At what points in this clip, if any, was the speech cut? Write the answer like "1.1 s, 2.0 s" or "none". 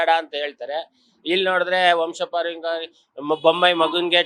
none